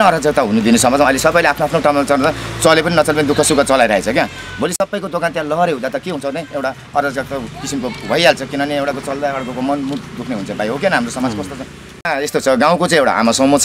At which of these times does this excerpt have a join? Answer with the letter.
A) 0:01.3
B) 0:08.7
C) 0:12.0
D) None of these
C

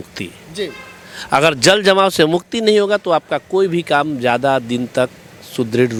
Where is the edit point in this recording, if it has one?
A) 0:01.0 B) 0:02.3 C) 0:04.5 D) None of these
D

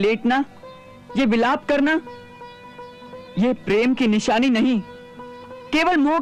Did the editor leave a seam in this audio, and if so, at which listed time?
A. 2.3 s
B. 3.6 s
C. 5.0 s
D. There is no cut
D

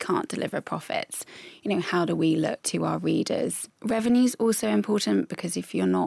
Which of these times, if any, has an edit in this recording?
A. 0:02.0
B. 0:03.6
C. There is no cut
B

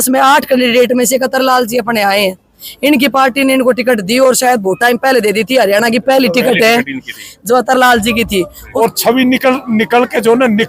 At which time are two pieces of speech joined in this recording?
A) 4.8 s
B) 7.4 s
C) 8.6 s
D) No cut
C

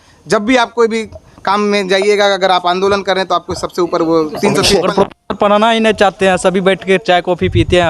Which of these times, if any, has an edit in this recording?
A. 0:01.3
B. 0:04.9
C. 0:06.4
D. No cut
B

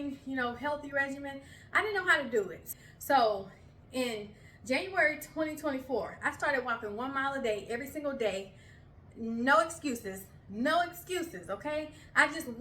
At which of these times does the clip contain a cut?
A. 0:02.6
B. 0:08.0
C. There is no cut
A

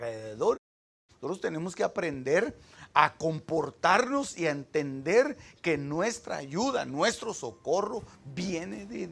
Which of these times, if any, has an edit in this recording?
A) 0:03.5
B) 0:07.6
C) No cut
C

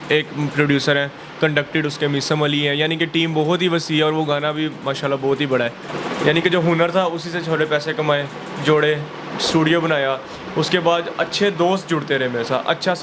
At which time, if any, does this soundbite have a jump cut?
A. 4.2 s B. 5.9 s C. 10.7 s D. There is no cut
B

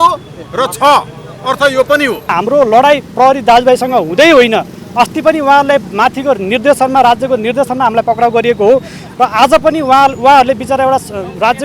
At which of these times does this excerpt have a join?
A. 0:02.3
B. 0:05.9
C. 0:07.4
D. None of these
A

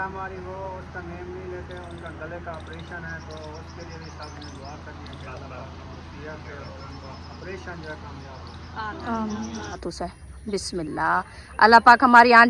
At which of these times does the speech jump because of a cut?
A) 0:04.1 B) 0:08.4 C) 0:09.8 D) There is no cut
C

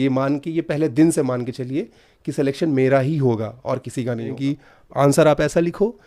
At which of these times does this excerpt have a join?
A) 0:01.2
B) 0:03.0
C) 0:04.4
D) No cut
C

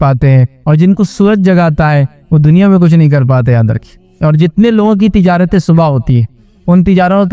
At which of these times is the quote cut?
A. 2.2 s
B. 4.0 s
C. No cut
B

